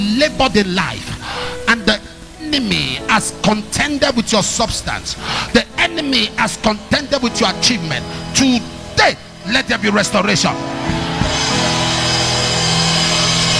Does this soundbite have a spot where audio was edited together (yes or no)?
no